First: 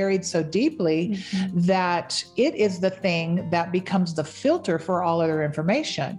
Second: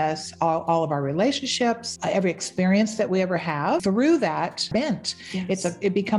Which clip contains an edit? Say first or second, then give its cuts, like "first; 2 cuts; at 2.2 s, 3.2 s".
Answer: second; 3 cuts; at 1.9 s, 3.8 s, 4.6 s